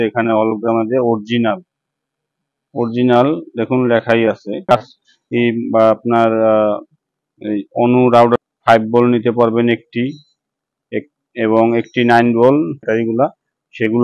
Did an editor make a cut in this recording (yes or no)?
yes